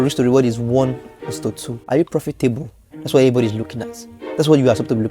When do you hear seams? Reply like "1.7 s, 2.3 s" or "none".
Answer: 1.7 s